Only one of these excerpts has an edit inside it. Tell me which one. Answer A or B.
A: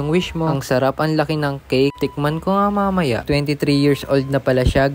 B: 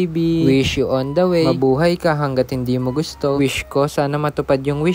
A